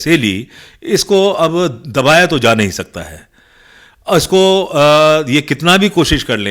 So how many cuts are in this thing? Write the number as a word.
zero